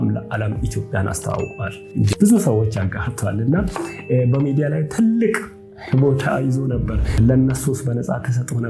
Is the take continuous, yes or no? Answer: no